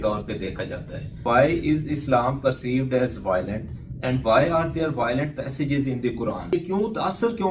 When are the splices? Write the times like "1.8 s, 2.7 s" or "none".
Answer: 1.2 s, 6.5 s